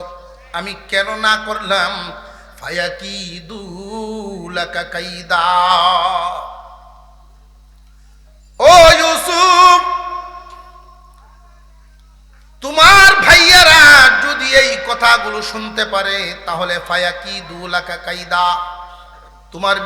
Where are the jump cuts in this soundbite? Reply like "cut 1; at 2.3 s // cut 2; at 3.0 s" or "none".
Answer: none